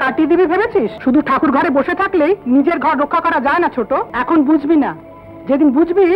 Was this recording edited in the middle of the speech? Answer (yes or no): yes